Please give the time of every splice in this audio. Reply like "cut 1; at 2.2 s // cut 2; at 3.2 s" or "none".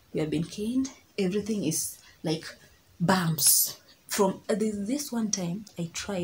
cut 1; at 4.4 s